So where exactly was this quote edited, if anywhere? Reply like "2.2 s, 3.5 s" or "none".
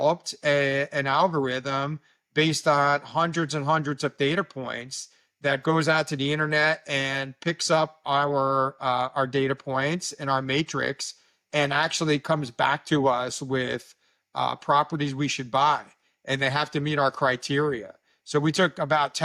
none